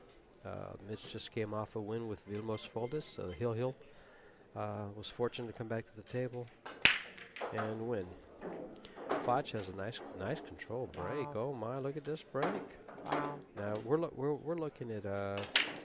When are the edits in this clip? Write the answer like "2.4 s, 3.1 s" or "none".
1.5 s